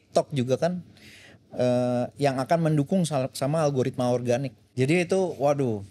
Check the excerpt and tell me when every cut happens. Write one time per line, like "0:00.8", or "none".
0:04.6